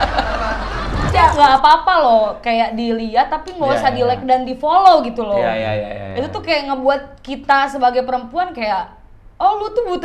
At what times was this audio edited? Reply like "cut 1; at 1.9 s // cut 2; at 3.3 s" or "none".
cut 1; at 1.1 s